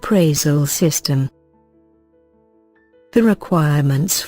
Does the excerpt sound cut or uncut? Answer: cut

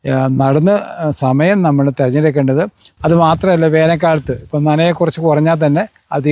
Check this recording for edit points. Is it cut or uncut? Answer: cut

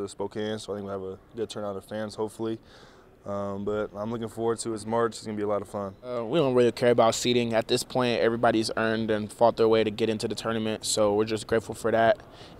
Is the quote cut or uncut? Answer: cut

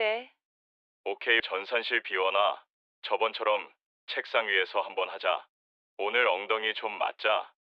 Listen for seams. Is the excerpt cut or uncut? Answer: cut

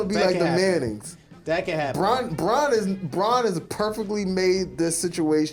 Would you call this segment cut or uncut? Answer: uncut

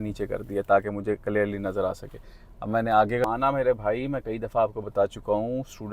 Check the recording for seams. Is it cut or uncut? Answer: cut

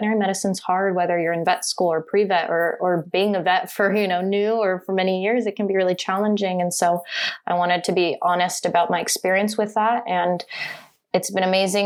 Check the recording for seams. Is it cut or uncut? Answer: uncut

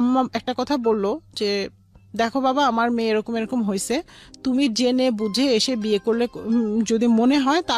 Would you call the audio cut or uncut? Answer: uncut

